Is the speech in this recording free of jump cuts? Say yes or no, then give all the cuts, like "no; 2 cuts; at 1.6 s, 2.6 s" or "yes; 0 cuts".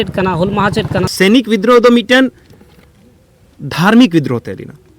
no; 1 cut; at 1.1 s